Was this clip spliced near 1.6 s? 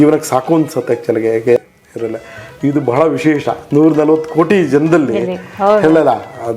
yes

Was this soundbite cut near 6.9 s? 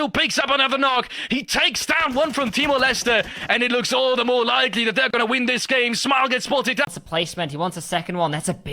yes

